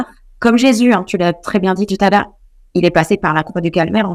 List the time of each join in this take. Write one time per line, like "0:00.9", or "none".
none